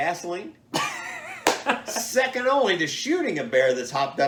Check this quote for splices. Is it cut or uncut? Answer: uncut